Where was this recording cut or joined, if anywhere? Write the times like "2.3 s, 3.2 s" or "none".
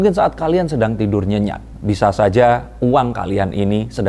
none